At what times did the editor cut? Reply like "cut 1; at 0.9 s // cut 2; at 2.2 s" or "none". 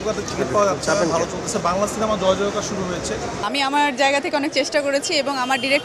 cut 1; at 3.4 s